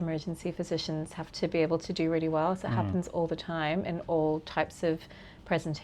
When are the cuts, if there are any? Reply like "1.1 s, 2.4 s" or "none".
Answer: none